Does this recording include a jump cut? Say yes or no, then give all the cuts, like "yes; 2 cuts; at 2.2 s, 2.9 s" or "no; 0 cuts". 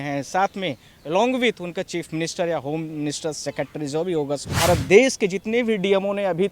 yes; 1 cut; at 4.5 s